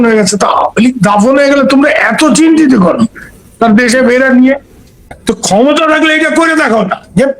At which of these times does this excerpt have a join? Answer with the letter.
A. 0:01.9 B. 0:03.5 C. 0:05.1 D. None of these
C